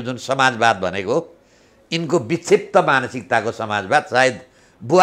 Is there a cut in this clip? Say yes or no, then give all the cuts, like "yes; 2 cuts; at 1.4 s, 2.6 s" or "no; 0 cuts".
no; 0 cuts